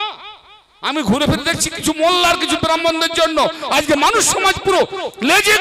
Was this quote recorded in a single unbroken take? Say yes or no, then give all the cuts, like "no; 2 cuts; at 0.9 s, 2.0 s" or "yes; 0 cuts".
yes; 0 cuts